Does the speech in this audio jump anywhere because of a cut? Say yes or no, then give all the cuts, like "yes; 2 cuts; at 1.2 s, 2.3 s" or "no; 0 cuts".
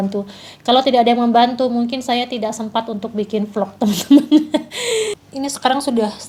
yes; 1 cut; at 5.1 s